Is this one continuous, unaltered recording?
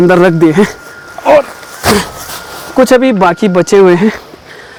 yes; 0 cuts

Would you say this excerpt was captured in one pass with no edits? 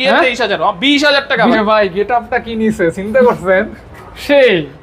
no; 1 cut; at 1.5 s

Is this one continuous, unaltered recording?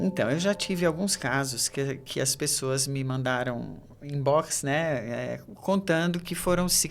yes; 0 cuts

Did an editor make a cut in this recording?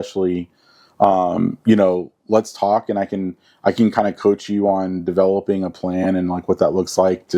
no; 0 cuts

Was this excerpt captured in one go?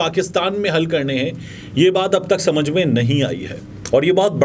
yes; 0 cuts

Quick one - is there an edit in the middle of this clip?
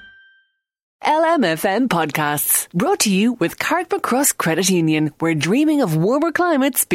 yes; 1 cut; at 0.9 s

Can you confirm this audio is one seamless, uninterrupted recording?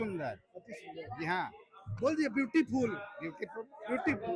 yes; 0 cuts

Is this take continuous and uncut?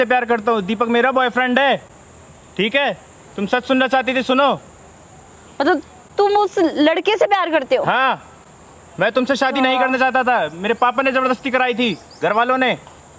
yes; 0 cuts

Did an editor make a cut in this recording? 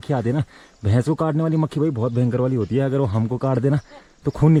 no; 0 cuts

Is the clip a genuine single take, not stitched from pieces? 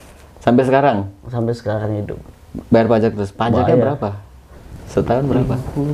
yes; 0 cuts

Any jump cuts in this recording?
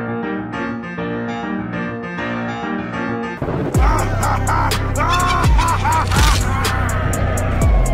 no; 0 cuts

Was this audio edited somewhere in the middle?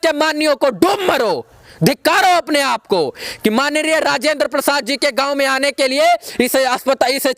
no; 0 cuts

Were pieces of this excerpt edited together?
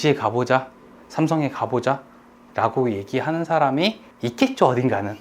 yes; 1 cut; at 4.1 s

